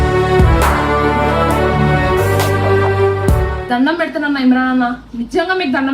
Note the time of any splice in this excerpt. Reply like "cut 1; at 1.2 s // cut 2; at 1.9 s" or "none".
cut 1; at 3.6 s